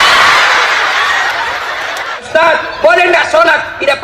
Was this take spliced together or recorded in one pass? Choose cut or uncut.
cut